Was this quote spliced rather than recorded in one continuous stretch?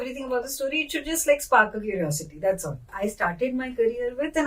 yes; 1 cut; at 2.9 s

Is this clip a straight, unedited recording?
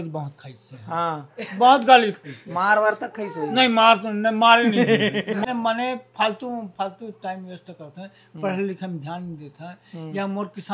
no; 1 cut; at 5.5 s

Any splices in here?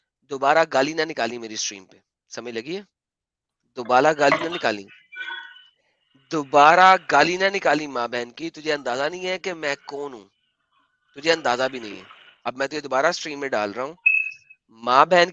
no; 0 cuts

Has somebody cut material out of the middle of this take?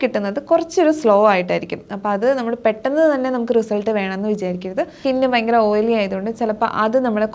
yes; 1 cut; at 5.0 s

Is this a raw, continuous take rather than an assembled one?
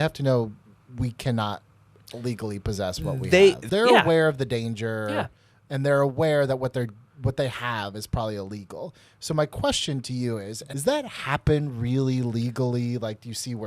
no; 2 cuts; at 3.6 s, 10.6 s

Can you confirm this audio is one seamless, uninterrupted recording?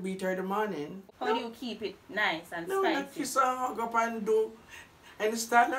no; 1 cut; at 0.9 s

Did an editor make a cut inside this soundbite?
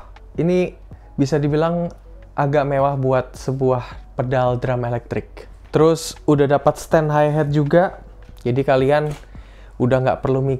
no; 0 cuts

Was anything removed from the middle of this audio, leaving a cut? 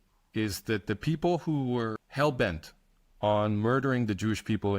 yes; 1 cut; at 2.0 s

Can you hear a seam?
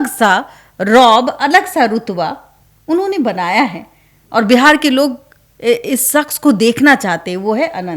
no; 0 cuts

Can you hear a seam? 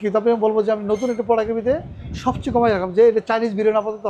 no; 0 cuts

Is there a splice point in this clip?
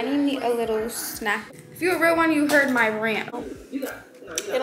yes; 2 cuts; at 1.4 s, 3.4 s

